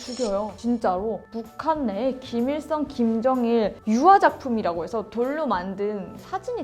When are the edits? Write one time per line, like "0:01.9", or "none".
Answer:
0:01.2